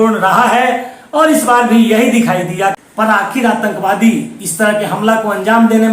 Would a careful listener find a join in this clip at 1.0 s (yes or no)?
no